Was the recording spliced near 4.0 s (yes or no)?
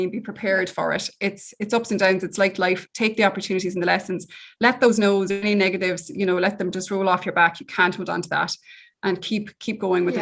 no